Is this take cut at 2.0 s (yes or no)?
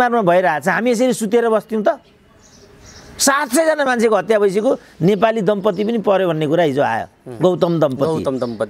no